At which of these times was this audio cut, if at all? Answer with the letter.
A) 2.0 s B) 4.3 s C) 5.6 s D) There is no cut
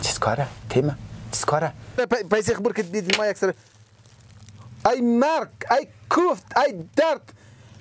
A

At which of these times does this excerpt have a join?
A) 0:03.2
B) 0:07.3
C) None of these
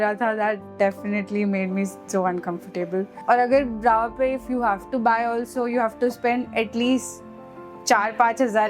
A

